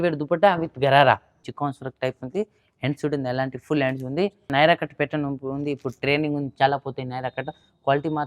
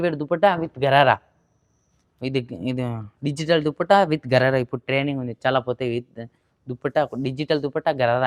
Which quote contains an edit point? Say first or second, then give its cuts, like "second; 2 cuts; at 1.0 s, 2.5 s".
first; 2 cuts; at 1.5 s, 4.5 s